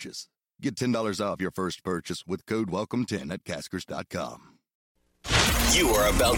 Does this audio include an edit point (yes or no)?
yes